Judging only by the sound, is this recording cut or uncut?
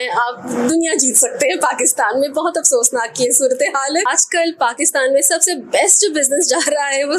cut